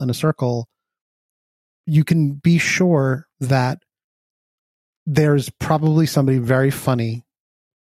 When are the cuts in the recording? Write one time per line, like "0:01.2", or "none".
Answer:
0:01.7